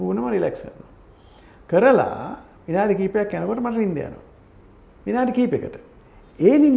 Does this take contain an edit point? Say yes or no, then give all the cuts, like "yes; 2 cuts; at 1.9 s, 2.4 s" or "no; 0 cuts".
no; 0 cuts